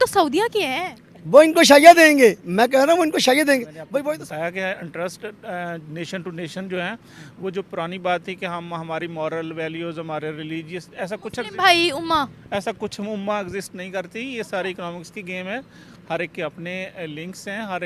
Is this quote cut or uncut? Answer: cut